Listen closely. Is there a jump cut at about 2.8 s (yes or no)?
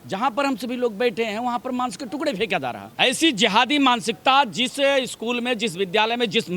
yes